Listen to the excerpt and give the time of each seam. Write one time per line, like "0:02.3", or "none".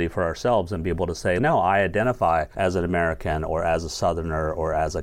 0:01.4
0:02.5